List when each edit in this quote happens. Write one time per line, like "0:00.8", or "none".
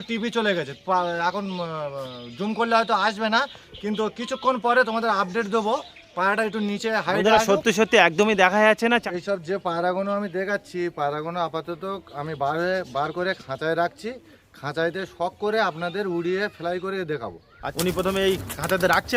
0:09.0
0:17.6

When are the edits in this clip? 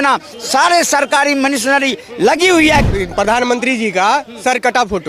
0:02.9

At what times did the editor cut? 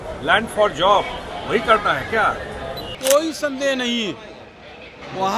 0:02.9

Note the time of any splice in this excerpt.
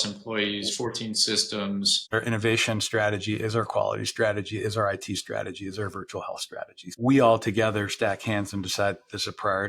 0:02.1
0:06.8

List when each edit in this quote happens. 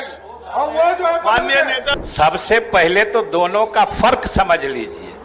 0:01.9

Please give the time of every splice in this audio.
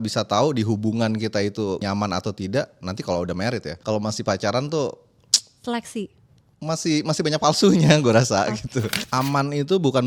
0:01.8
0:03.7
0:09.0

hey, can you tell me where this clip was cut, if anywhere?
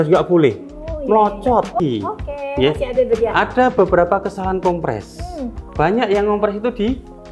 0:01.8

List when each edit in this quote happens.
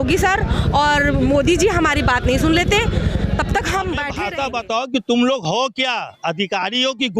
0:04.2

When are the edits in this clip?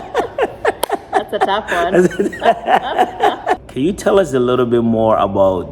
0:03.6

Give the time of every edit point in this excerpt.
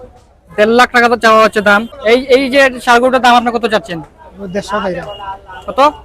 0:01.9

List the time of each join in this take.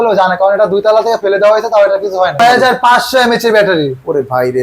0:02.4

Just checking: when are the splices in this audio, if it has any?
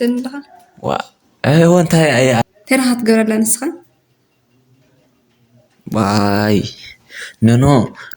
0:02.4

